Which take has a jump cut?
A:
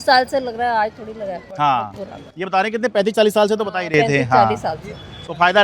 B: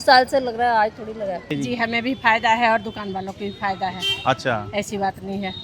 B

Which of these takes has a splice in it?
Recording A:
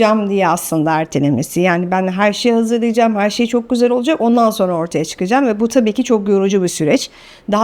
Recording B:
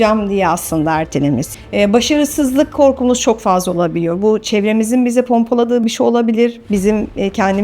B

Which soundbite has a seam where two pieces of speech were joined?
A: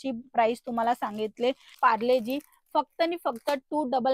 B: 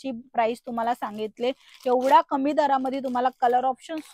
A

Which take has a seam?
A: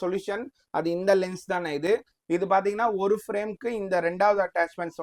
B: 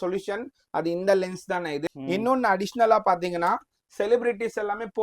B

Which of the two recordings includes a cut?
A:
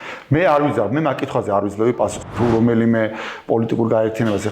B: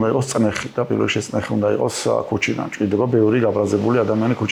A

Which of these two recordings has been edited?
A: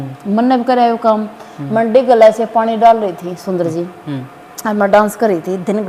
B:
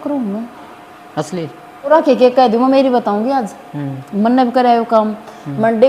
B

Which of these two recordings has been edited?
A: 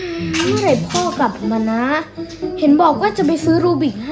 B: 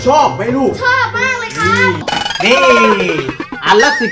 B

